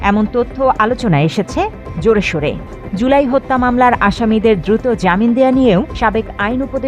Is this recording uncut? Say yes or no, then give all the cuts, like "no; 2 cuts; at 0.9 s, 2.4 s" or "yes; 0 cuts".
no; 1 cut; at 2.8 s